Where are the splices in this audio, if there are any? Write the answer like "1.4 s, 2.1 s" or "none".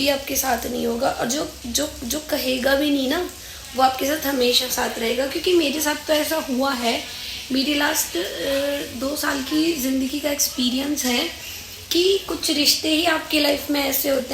none